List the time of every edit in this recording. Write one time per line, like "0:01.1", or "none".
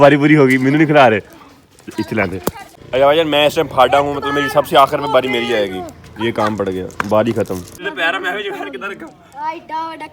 0:02.7
0:07.8